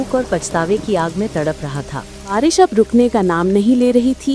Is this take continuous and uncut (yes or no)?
no